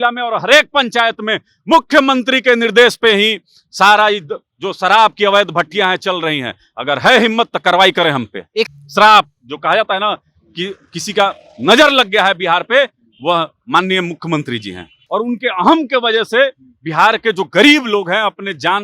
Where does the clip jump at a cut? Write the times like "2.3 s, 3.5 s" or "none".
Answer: 8.7 s, 15.0 s

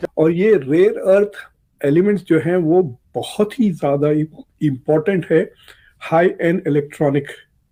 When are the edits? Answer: none

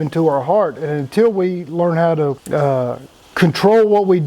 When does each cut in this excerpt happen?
none

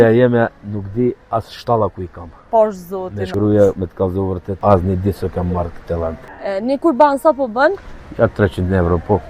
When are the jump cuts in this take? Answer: 3.2 s, 4.5 s, 6.3 s

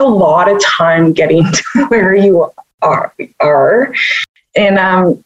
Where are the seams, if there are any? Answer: none

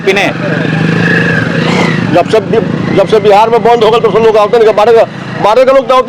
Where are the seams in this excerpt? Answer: none

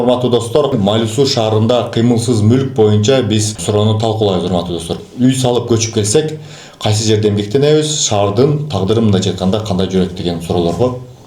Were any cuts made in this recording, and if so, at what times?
0.7 s, 3.5 s, 4.9 s

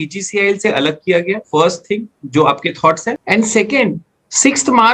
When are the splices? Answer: 1.4 s, 3.2 s

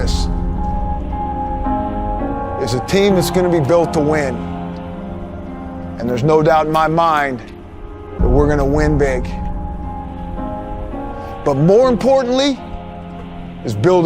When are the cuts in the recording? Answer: 1.5 s

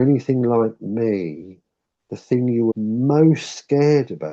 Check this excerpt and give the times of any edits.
2.8 s

